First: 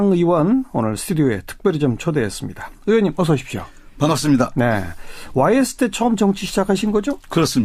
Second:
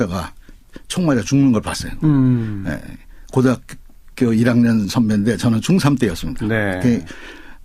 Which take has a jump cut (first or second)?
second